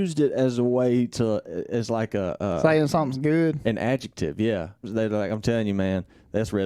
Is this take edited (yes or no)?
yes